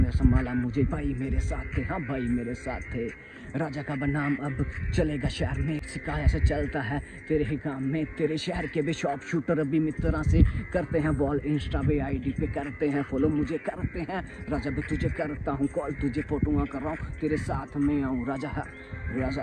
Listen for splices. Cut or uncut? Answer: uncut